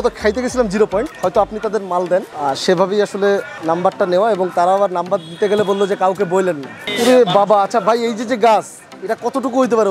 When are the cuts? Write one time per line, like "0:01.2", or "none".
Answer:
0:01.1
0:02.3
0:03.5
0:06.9

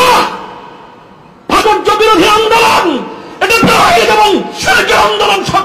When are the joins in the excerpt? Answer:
0:01.6

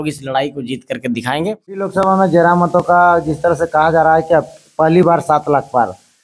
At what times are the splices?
0:01.9

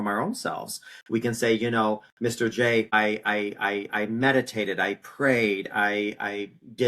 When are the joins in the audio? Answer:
0:02.9

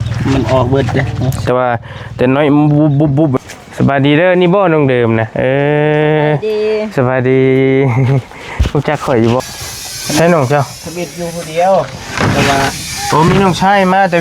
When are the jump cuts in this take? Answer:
0:03.3
0:09.4

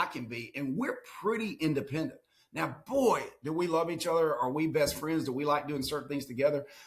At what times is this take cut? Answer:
none

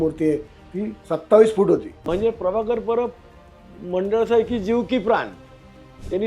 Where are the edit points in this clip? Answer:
0:01.0
0:02.1

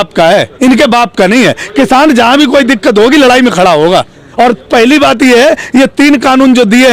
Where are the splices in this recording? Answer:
none

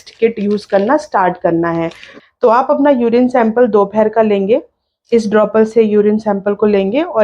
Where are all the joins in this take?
0:02.1

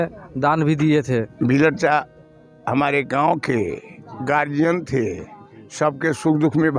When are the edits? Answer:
0:01.3

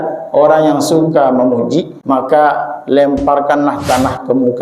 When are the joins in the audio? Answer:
0:01.9

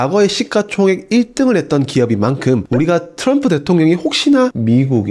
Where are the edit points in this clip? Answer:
none

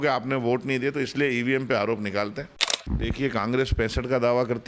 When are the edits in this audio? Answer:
0:02.9

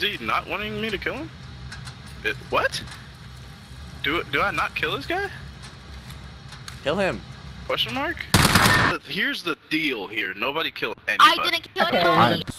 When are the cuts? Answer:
0:08.9

